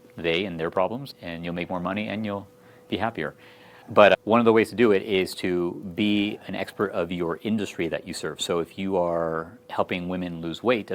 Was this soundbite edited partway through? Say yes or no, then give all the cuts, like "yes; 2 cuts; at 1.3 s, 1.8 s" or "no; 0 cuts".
no; 0 cuts